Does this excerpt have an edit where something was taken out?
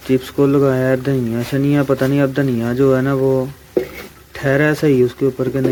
no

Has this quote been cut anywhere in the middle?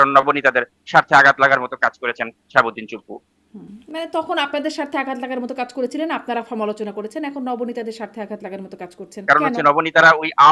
yes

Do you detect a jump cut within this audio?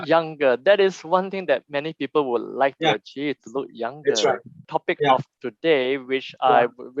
yes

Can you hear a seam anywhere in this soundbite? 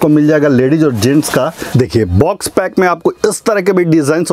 yes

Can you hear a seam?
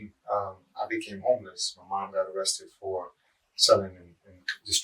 no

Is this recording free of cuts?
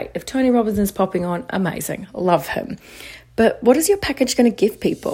yes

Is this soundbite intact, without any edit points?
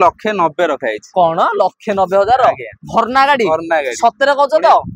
yes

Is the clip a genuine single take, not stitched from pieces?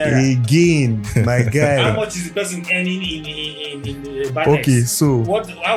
yes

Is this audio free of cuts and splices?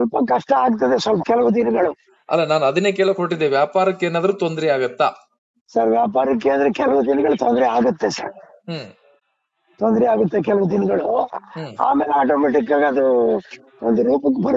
yes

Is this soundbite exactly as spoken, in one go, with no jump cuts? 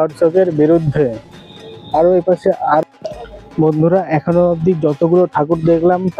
no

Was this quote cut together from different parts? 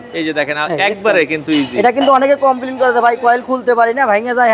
no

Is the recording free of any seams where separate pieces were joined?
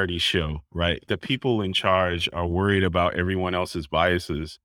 no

